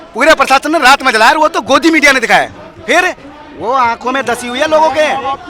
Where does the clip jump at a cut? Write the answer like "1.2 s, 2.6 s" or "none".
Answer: none